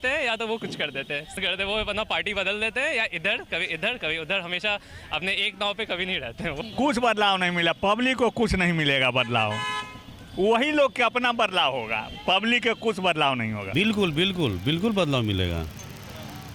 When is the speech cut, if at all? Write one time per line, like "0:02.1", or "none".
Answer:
0:01.3
0:06.7
0:13.7